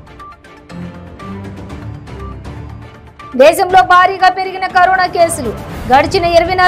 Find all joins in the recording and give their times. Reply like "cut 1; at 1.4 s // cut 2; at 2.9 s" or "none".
none